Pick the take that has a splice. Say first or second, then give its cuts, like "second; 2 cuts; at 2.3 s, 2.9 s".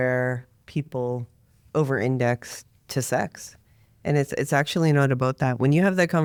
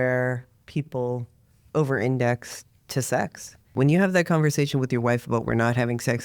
second; 1 cut; at 3.7 s